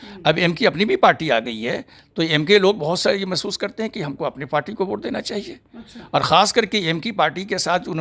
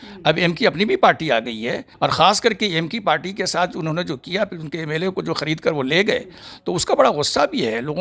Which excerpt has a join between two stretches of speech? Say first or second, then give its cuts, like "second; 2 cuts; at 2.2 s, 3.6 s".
second; 1 cut; at 1.8 s